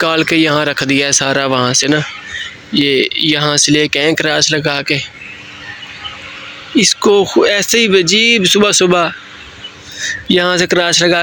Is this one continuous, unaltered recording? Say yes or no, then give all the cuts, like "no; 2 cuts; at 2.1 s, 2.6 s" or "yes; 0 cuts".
yes; 0 cuts